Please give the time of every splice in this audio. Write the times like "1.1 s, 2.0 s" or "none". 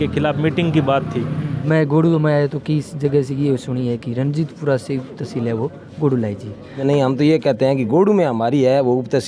1.5 s, 6.8 s